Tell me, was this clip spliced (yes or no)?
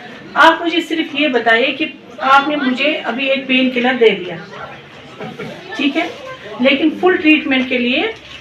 no